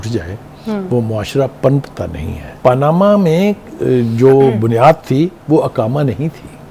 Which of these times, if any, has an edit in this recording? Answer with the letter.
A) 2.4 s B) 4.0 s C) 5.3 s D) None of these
A